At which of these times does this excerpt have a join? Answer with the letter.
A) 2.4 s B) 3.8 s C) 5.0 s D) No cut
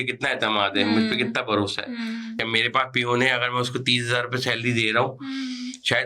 A